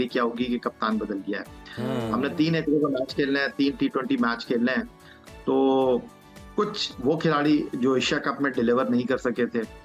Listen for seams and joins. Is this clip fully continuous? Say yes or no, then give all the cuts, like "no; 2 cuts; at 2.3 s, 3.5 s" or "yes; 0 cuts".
yes; 0 cuts